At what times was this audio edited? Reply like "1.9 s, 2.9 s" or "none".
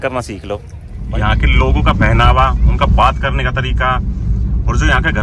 0.9 s